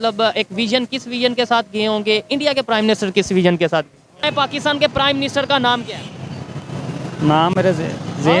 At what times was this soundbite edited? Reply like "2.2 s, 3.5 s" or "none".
4.2 s